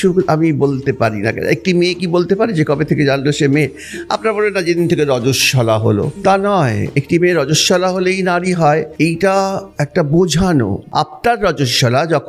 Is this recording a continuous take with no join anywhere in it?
no; 4 cuts; at 6.2 s, 8.9 s, 9.7 s, 10.8 s

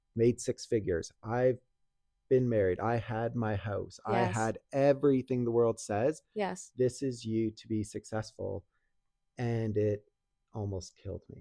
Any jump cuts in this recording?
no; 0 cuts

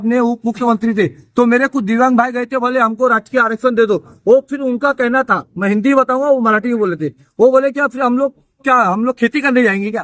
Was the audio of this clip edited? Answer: no; 0 cuts

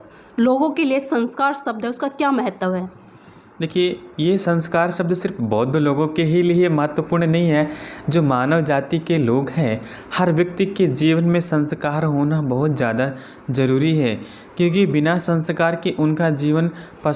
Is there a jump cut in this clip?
no; 0 cuts

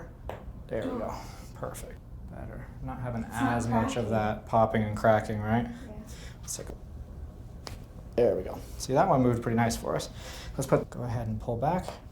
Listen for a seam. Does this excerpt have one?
yes; 3 cuts; at 2.1 s, 6.7 s, 10.8 s

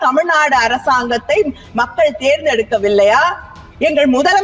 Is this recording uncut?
yes; 0 cuts

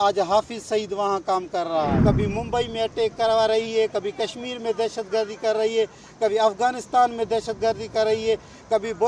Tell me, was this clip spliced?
yes; 1 cut; at 2.0 s

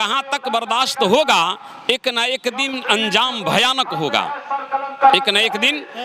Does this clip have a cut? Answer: no; 0 cuts

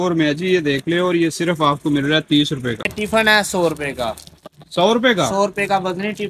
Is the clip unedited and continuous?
no; 1 cut; at 2.9 s

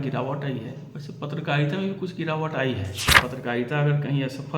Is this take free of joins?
no; 1 cut; at 3.2 s

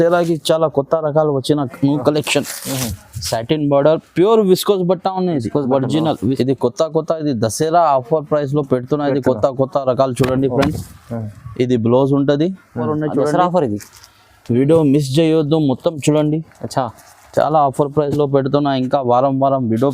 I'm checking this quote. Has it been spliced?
yes; 2 cuts; at 6.2 s, 12.9 s

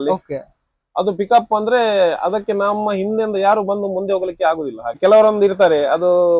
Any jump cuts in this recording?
yes; 1 cut; at 5.0 s

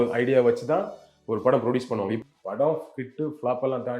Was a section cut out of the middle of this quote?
yes; 1 cut; at 2.2 s

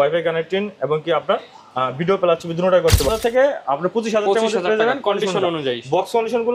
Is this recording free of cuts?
no; 1 cut; at 3.1 s

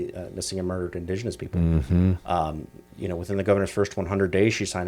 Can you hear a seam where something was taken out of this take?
no; 0 cuts

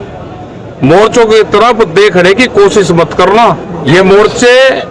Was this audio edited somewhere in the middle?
yes; 1 cut; at 3.7 s

